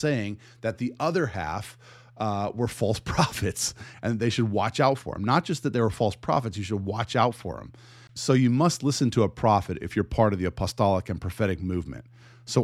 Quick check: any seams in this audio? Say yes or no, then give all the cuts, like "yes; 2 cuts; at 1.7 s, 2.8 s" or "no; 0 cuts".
no; 0 cuts